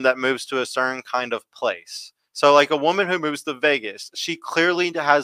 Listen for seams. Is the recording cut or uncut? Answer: uncut